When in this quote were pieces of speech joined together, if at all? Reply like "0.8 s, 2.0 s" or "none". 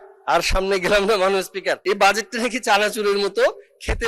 1.8 s